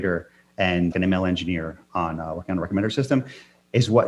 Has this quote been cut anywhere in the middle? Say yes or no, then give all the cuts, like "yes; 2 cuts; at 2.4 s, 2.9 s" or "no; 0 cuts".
yes; 1 cut; at 0.9 s